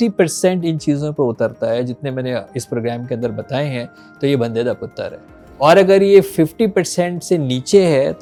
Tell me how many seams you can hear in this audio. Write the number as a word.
zero